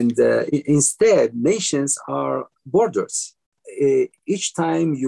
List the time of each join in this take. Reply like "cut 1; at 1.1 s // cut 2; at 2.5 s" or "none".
cut 1; at 3.6 s